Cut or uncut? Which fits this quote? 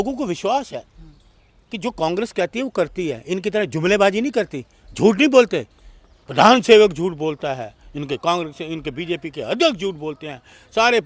uncut